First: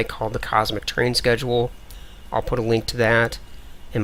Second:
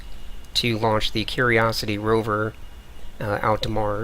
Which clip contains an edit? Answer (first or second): second